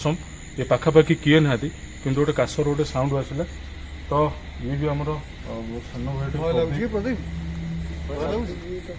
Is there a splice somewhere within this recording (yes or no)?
no